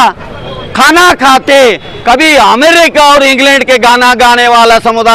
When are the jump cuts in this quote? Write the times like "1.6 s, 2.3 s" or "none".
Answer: none